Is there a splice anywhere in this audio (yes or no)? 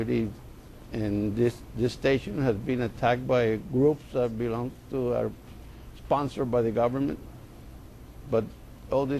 yes